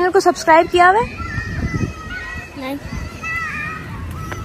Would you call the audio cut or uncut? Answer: uncut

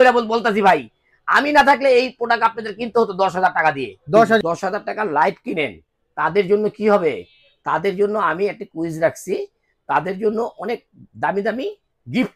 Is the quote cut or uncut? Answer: cut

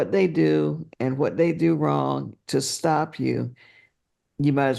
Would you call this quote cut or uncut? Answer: uncut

